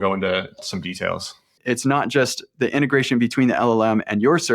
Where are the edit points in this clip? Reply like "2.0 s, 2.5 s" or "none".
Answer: 1.6 s